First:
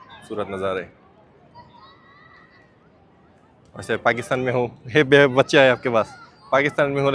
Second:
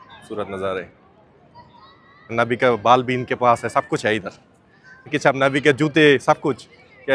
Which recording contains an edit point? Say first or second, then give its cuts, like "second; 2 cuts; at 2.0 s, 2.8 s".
second; 2 cuts; at 2.3 s, 5.1 s